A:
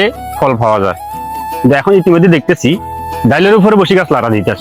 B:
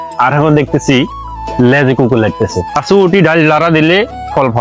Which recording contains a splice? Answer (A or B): B